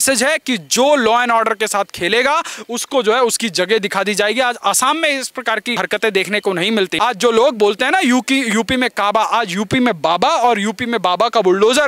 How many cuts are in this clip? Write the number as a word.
two